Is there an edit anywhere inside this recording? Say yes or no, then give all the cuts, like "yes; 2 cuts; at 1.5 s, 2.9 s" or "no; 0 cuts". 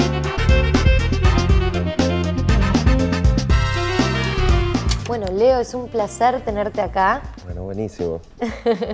yes; 1 cut; at 3.4 s